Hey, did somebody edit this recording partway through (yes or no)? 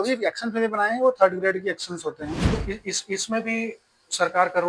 yes